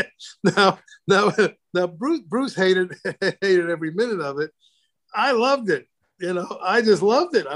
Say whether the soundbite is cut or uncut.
uncut